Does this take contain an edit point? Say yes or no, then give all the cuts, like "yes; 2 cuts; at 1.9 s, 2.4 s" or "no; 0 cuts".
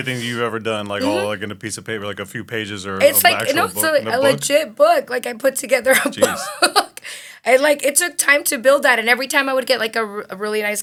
no; 0 cuts